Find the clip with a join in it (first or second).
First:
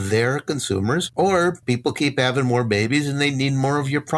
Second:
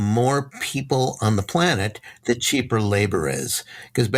first